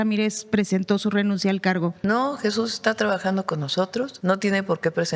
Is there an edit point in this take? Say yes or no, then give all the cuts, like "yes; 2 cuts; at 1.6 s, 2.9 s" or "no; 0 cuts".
yes; 2 cuts; at 2.0 s, 4.1 s